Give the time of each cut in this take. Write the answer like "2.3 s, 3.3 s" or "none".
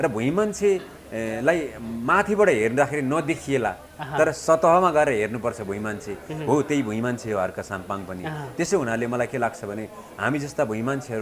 none